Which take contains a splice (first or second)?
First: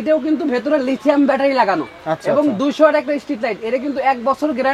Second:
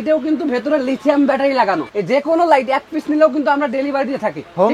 second